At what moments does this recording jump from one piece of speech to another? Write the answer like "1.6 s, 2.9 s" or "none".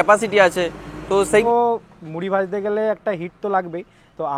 1.4 s